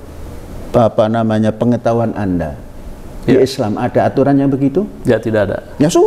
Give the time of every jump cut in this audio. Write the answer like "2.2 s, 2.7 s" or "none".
none